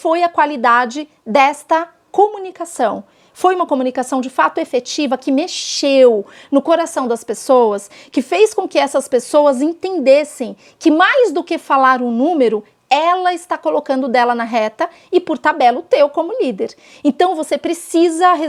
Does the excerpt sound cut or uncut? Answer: uncut